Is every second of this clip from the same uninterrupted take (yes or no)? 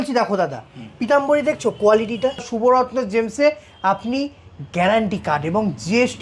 no